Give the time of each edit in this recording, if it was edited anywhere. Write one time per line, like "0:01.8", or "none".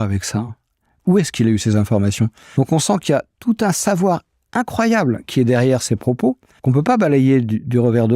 0:02.4
0:06.5